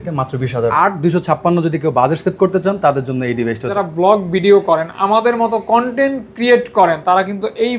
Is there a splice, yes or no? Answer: yes